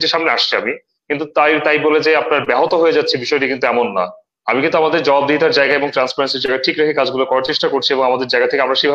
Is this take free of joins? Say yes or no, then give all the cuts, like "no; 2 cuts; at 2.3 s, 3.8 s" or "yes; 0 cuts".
yes; 0 cuts